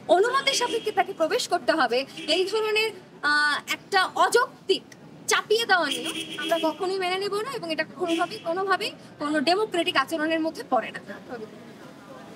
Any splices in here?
no; 0 cuts

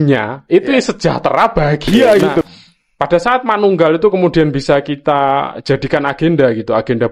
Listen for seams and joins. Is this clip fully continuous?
no; 1 cut; at 2.4 s

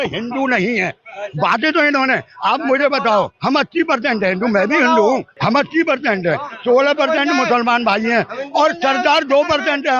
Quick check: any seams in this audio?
yes; 1 cut; at 5.3 s

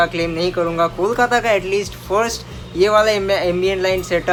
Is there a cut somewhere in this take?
no; 0 cuts

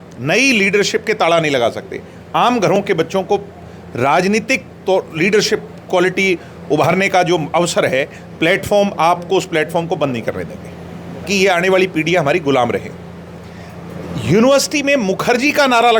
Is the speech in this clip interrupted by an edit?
yes; 1 cut; at 11.3 s

